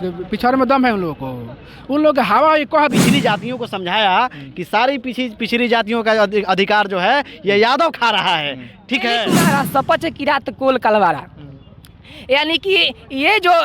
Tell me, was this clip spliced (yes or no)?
yes